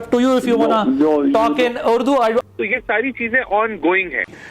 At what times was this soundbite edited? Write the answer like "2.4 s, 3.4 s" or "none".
2.4 s